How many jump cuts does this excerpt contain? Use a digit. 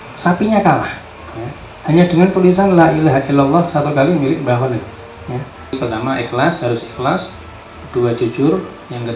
1